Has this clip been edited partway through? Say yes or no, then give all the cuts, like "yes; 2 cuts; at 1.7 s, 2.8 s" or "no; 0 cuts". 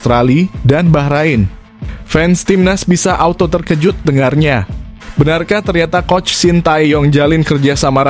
no; 0 cuts